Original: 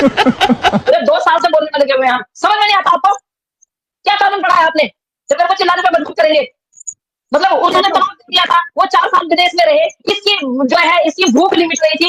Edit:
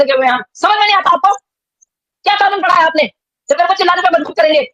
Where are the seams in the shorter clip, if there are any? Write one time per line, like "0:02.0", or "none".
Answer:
none